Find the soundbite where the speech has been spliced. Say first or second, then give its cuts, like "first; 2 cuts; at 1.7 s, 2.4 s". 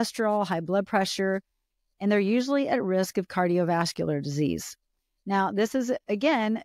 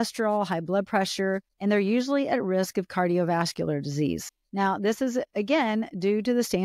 second; 2 cuts; at 1.5 s, 4.4 s